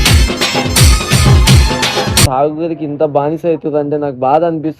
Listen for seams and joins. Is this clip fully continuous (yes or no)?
no